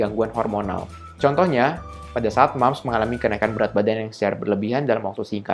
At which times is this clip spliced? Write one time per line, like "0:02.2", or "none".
none

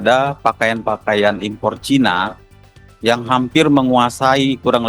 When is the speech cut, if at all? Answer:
none

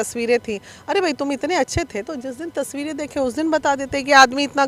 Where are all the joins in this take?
none

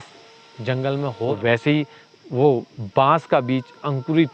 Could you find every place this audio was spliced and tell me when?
0:01.3

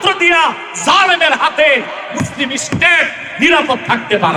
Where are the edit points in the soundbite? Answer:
none

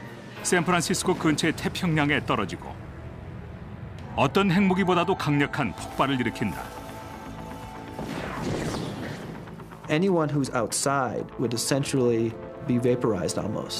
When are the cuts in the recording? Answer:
none

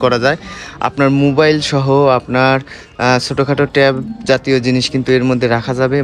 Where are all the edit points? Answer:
none

